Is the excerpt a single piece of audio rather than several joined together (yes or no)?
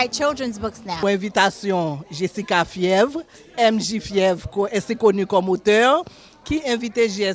no